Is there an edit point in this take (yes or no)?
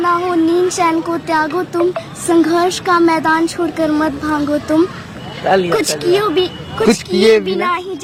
no